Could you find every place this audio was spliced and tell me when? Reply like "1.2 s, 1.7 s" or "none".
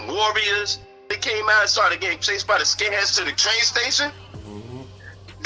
1.1 s